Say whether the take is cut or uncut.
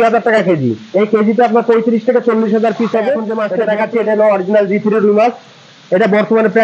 cut